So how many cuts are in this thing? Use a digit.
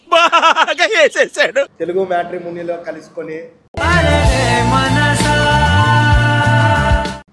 1